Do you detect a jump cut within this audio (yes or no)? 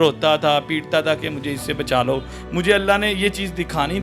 yes